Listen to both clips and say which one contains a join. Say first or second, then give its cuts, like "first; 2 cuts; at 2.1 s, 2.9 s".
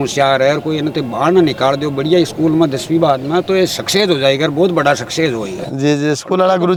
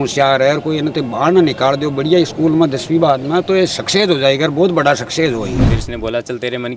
second; 1 cut; at 5.6 s